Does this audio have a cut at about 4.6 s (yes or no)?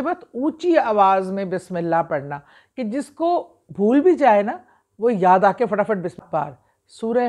no